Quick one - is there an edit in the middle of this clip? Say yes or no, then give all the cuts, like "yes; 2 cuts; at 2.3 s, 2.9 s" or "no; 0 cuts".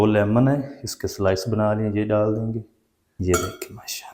yes; 1 cut; at 3.1 s